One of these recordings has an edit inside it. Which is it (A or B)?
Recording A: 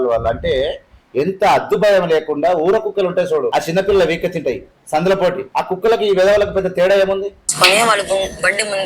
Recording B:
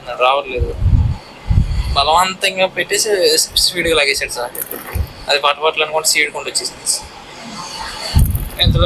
A